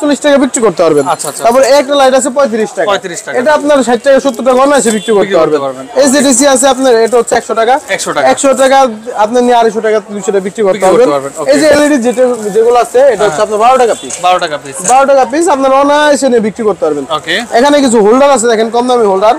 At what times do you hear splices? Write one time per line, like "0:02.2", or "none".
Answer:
none